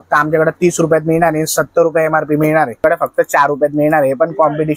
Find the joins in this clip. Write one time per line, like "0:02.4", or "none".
0:02.8